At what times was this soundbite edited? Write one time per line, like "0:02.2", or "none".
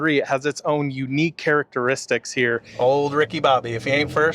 0:02.7

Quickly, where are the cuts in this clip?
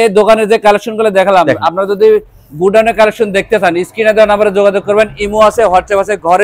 none

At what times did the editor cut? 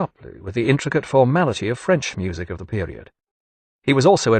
0:01.9

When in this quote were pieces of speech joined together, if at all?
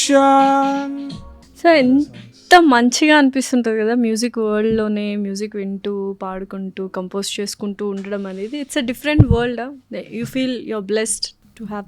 none

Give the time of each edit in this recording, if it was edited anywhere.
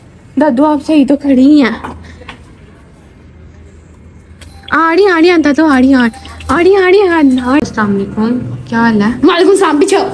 0:07.6

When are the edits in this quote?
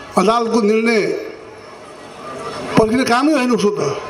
none

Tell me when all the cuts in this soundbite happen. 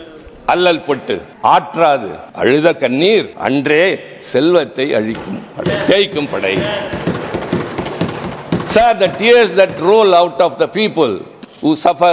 0:01.3
0:02.2
0:03.3

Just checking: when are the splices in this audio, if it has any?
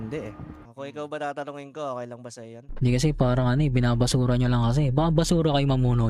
none

